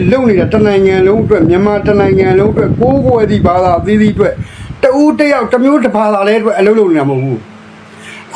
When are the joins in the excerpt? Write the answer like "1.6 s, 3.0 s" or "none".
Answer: none